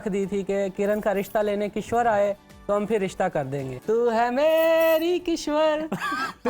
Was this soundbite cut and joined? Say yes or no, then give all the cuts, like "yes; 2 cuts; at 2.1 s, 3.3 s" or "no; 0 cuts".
yes; 2 cuts; at 0.7 s, 3.7 s